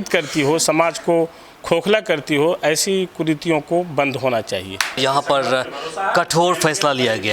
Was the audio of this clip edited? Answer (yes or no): yes